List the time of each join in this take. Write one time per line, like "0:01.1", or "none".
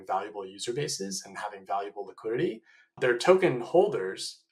0:03.0